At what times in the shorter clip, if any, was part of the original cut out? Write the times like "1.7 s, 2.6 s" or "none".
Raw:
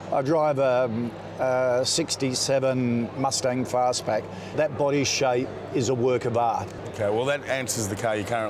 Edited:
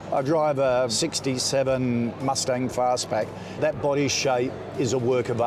0.9 s